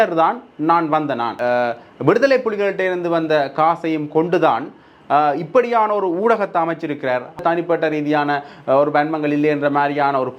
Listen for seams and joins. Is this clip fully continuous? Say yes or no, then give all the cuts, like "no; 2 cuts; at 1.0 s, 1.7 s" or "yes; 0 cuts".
no; 2 cuts; at 1.4 s, 7.4 s